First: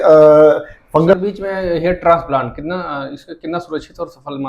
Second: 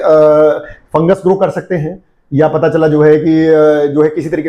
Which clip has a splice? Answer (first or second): first